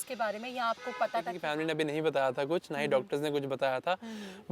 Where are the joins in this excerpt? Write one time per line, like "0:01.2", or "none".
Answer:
0:01.4